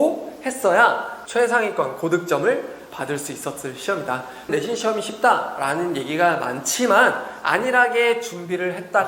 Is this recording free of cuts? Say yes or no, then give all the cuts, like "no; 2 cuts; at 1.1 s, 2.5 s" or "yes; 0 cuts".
no; 2 cuts; at 1.1 s, 4.5 s